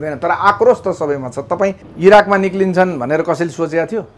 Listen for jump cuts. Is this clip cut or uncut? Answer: cut